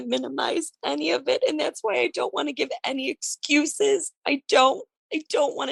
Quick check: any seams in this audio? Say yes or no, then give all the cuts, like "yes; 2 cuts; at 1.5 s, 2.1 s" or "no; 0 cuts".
no; 0 cuts